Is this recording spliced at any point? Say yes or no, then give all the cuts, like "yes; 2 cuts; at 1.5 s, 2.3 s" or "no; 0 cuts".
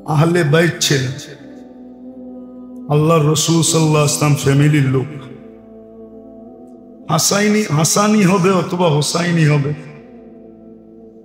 no; 0 cuts